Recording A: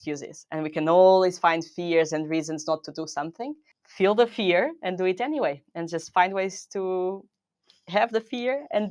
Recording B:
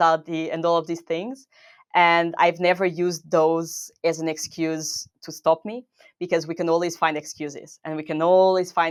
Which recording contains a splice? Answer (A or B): A